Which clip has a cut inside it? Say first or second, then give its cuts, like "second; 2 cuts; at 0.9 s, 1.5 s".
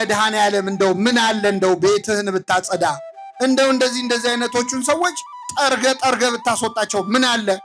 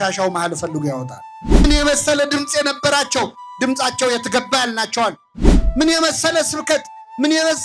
second; 1 cut; at 1.6 s